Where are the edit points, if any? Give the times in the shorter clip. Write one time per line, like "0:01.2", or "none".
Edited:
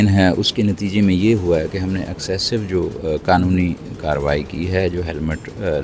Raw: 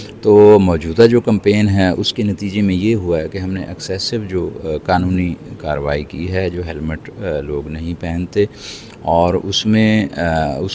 none